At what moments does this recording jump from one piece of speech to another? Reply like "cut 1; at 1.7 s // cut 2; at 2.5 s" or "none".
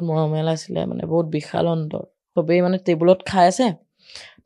cut 1; at 2.2 s